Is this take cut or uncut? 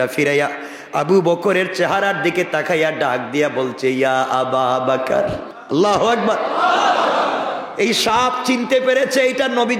cut